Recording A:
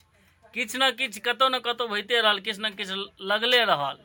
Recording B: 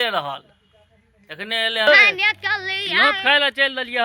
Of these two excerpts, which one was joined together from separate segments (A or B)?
B